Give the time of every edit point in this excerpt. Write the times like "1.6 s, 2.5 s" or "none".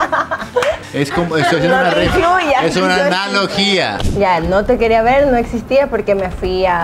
0.8 s, 4.0 s